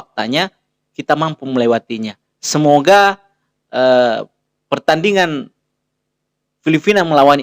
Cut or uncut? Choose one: uncut